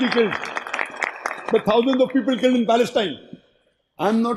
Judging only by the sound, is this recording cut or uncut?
uncut